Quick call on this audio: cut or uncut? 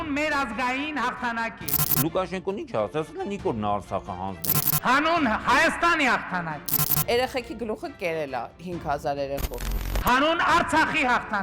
uncut